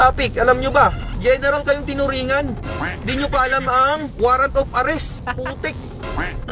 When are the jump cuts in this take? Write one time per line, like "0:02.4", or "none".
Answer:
0:01.0
0:05.2